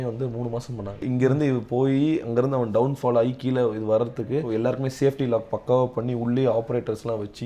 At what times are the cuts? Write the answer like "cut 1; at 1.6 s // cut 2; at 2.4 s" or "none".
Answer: cut 1; at 1.0 s // cut 2; at 4.5 s